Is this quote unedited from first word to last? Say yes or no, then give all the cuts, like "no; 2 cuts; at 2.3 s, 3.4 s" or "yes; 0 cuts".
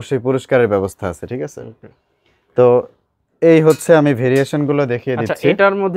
yes; 0 cuts